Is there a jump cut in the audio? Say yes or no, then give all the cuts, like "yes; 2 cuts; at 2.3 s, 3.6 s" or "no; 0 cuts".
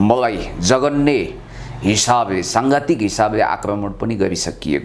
no; 0 cuts